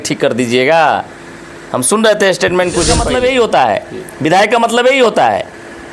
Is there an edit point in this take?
yes; 1 cut; at 3.0 s

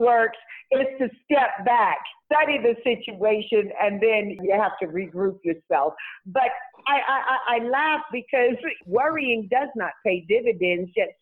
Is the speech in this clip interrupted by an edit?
yes; 3 cuts; at 2.1 s, 4.4 s, 8.8 s

